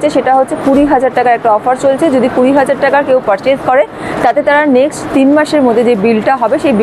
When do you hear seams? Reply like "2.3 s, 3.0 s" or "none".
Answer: none

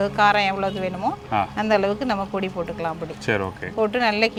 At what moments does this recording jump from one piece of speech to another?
none

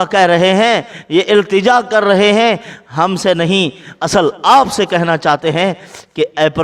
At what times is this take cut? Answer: none

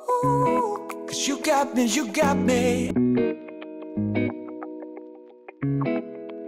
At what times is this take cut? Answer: 5.6 s

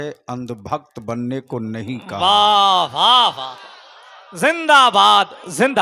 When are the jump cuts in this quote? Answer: none

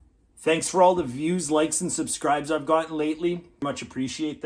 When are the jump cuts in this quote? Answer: 3.5 s

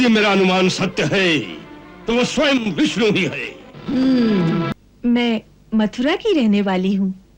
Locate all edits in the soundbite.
4.7 s

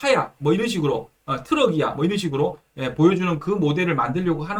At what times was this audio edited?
none

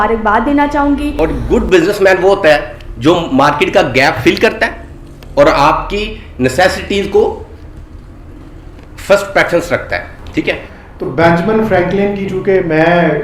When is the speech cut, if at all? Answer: 1.1 s, 10.8 s

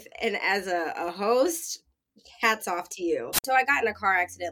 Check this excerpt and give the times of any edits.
2.9 s

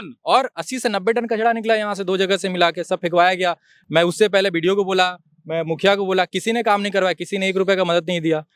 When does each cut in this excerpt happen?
none

